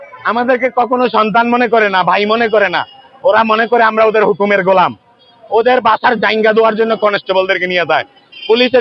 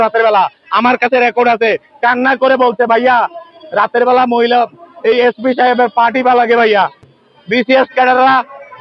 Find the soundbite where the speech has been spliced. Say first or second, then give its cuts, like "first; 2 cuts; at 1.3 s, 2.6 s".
second; 1 cut; at 7.1 s